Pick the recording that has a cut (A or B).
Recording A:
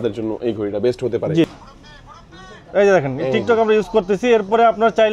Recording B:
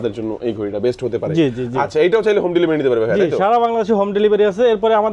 A